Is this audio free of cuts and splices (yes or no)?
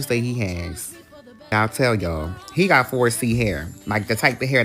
no